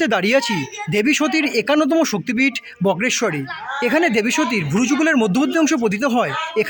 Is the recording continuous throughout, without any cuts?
yes; 0 cuts

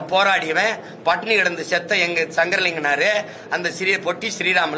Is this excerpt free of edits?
yes; 0 cuts

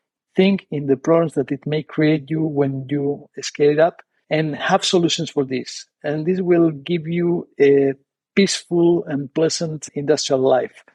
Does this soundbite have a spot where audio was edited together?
no; 0 cuts

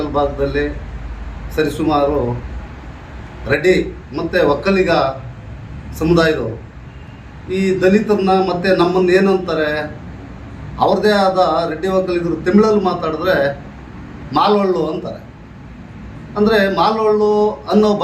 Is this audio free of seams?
yes; 0 cuts

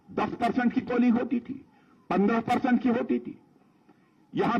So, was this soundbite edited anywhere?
no; 0 cuts

